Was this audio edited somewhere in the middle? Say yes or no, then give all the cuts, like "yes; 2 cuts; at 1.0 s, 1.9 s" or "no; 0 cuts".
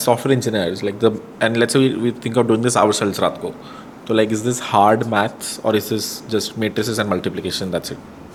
no; 0 cuts